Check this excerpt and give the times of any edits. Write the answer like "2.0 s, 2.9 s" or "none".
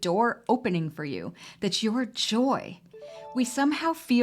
3.0 s